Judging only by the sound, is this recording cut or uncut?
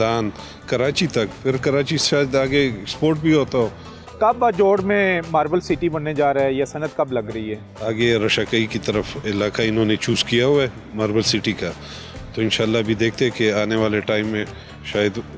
uncut